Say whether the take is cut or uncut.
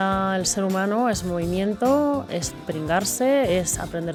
uncut